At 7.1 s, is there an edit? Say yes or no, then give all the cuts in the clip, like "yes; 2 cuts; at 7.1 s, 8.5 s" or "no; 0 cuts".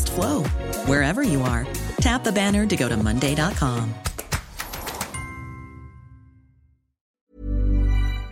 yes; 1 cut; at 7.1 s